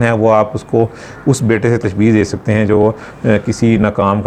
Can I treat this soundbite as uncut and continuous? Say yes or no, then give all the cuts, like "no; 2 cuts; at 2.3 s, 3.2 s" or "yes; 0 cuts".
yes; 0 cuts